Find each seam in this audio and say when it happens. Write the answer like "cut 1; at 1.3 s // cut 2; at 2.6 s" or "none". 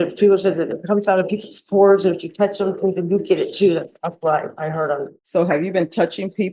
cut 1; at 5.2 s